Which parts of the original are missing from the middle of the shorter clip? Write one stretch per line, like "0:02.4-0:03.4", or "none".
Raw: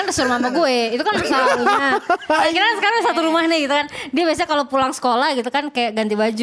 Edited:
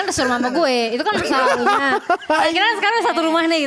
none